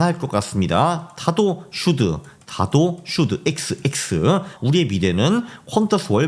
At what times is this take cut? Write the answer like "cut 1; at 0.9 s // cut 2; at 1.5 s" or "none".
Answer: cut 1; at 4.5 s